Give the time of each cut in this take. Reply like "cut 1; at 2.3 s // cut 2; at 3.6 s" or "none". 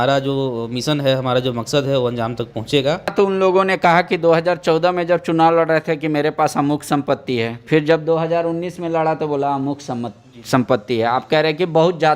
cut 1; at 3.1 s